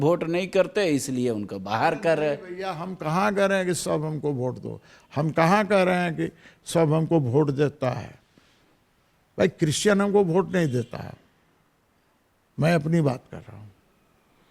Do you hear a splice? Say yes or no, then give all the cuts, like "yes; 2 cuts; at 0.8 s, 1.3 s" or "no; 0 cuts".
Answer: no; 0 cuts